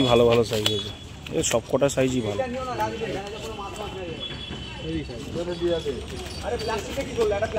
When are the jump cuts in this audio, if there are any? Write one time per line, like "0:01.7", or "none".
none